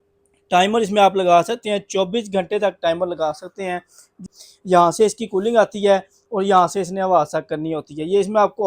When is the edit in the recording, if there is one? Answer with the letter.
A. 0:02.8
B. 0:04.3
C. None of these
B